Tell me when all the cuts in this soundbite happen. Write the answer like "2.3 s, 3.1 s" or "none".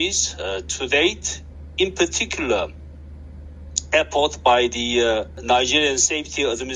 5.4 s